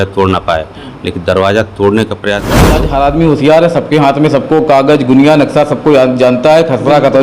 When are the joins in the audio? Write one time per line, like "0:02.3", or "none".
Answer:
0:02.8